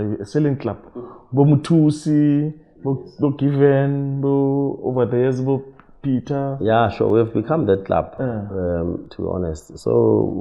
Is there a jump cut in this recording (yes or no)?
no